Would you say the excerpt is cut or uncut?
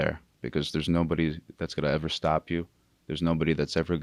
uncut